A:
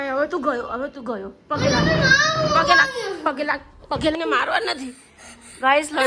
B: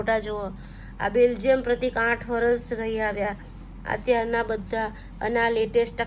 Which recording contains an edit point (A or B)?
A